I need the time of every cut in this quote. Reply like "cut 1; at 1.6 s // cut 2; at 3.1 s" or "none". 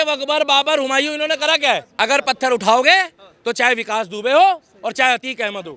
cut 1; at 1.9 s